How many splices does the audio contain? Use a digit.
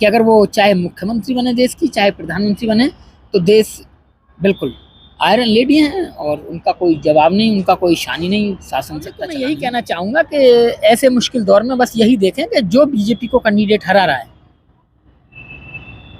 1